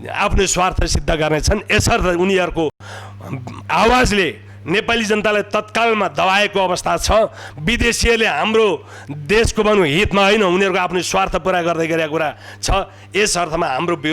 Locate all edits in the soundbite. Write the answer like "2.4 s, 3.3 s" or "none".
none